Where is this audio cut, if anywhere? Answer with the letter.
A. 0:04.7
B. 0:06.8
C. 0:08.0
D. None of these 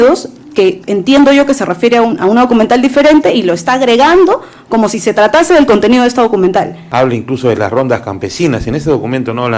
B